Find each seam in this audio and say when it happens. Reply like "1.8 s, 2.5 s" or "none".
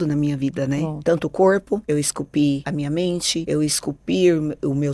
0.9 s, 1.8 s, 2.9 s